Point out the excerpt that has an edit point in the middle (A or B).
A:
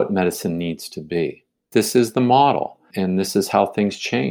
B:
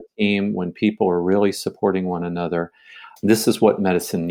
A